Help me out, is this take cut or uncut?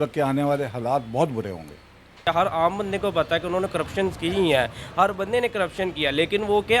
cut